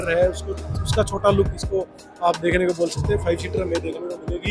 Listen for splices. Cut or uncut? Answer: uncut